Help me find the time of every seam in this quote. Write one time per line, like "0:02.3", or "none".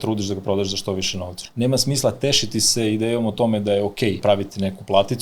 0:01.4
0:04.2